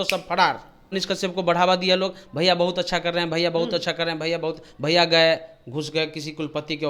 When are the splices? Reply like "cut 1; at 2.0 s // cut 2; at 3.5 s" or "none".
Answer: cut 1; at 0.9 s